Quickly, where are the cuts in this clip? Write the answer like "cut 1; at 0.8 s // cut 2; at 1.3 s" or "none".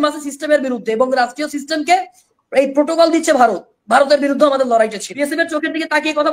cut 1; at 5.1 s